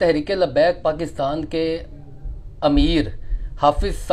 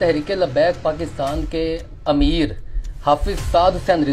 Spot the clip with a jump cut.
second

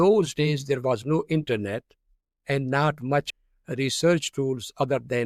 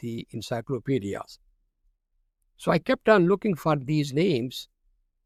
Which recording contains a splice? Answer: first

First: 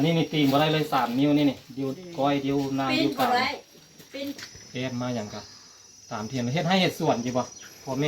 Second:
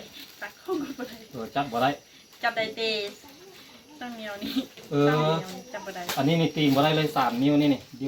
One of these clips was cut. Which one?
first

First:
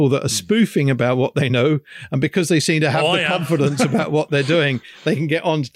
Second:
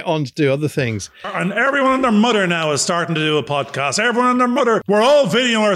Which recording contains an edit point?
second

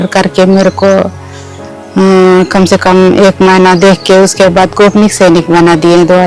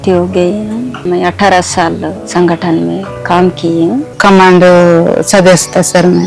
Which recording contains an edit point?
second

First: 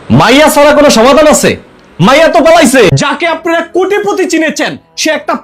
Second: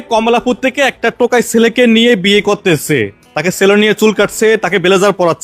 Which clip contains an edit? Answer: first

